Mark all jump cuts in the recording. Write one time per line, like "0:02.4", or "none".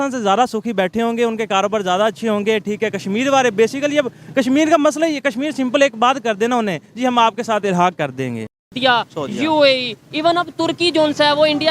0:08.8